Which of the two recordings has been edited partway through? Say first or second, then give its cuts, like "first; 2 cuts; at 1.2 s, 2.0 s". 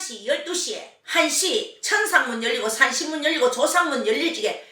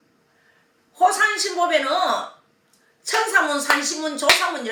first; 1 cut; at 0.9 s